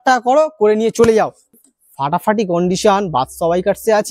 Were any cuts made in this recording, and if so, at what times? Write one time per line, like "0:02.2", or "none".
0:01.5